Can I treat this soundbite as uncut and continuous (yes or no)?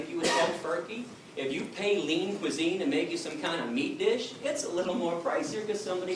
yes